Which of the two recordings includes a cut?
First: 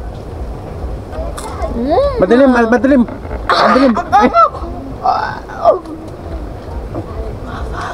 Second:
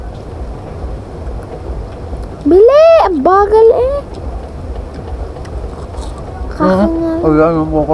first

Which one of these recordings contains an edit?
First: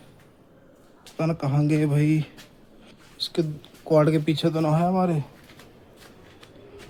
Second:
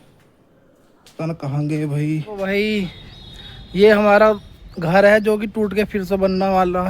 second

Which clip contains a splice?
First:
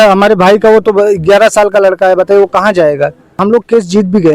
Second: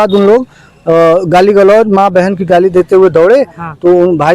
first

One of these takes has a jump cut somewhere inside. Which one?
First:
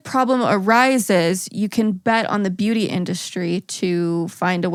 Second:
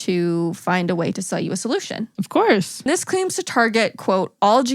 second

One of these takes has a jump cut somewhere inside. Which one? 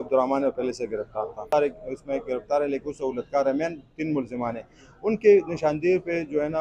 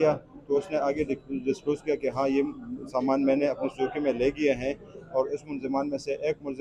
first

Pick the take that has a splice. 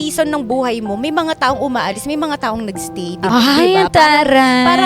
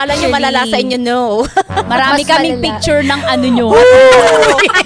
first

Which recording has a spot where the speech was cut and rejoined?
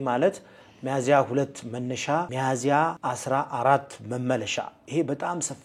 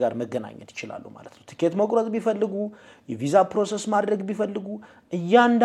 first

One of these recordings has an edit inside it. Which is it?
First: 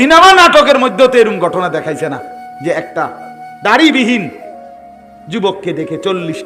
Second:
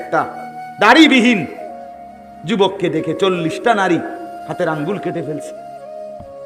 second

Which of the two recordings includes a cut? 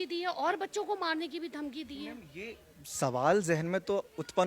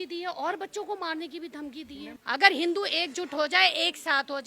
second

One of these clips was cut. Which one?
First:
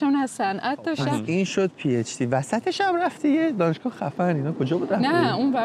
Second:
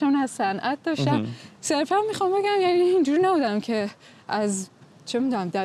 first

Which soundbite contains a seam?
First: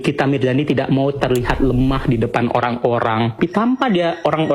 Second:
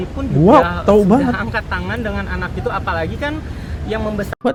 first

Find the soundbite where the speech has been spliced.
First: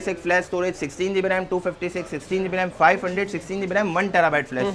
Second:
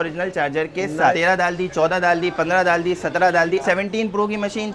second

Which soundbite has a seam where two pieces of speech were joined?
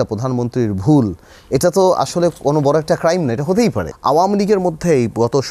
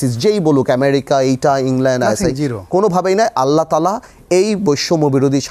first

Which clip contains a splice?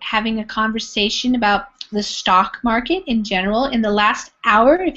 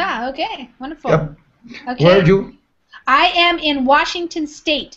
second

